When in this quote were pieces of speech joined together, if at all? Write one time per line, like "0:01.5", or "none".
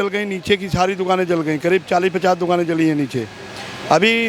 none